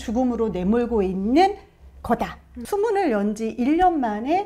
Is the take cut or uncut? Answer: cut